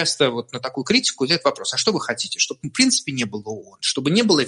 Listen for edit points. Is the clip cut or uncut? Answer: uncut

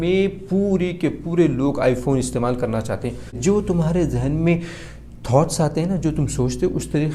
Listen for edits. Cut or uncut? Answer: cut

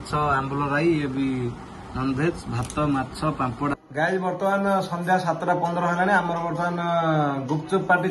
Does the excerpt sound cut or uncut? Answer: cut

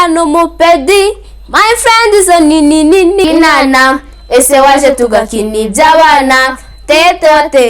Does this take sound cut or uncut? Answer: cut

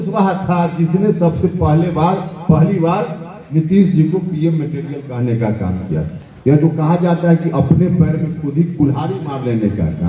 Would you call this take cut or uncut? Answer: cut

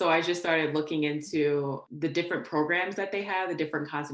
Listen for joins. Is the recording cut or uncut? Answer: cut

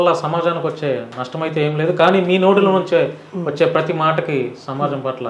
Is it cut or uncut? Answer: uncut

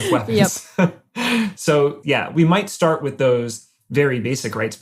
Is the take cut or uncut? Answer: cut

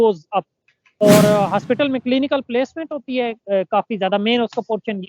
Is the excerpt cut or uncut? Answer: cut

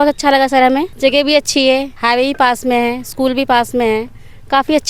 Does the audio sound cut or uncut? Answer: cut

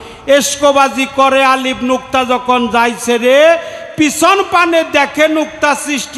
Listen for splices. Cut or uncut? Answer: uncut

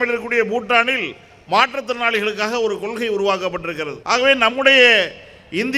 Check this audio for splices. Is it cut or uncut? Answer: cut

